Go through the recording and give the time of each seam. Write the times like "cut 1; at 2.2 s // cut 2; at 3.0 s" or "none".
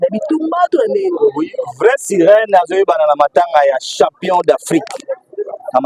none